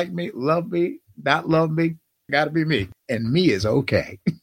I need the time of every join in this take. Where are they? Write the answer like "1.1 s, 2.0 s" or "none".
2.3 s, 2.9 s